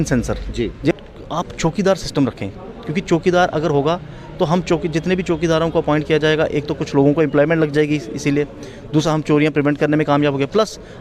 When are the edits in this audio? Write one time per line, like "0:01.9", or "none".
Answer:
0:00.9